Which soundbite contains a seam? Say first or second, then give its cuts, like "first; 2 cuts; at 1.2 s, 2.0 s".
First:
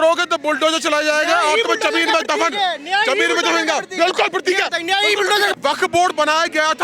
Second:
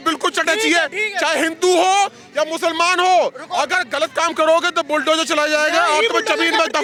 first; 1 cut; at 5.5 s